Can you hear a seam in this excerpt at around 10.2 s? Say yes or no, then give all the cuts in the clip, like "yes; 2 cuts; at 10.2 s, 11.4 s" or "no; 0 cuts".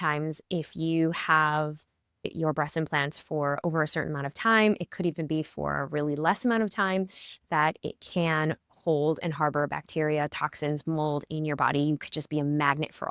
no; 1 cut; at 2.3 s